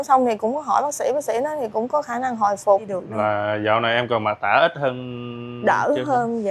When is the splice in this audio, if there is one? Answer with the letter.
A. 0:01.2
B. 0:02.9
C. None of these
B